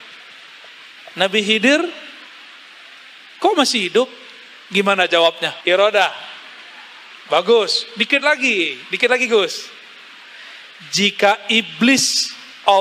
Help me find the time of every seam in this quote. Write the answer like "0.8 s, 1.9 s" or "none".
5.5 s